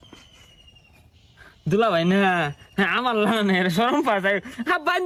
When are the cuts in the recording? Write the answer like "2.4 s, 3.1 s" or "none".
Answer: none